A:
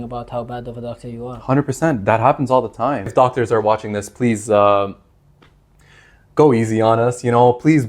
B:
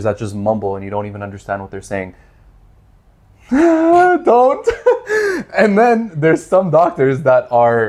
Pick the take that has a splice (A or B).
A